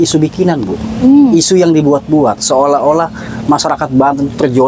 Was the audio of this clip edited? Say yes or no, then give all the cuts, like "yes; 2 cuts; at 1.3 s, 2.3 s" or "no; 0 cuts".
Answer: no; 0 cuts